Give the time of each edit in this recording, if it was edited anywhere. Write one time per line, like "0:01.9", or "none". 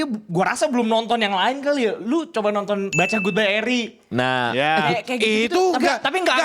0:02.9